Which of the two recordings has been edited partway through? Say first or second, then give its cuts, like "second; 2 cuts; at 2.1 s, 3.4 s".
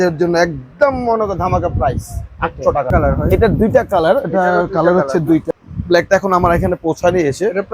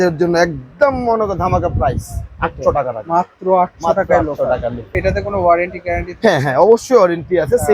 first; 2 cuts; at 2.9 s, 5.5 s